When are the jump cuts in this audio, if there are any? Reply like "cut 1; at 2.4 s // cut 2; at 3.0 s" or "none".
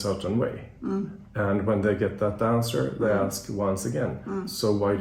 none